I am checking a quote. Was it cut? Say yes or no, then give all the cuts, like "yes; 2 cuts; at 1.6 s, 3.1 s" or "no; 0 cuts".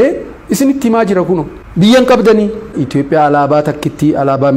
yes; 2 cuts; at 1.6 s, 2.8 s